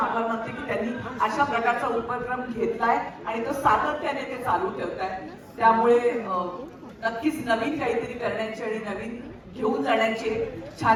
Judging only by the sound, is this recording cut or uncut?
uncut